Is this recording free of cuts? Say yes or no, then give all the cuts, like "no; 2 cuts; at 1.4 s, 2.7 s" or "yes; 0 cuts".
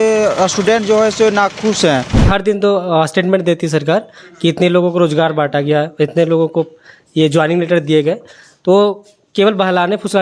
no; 1 cut; at 2.2 s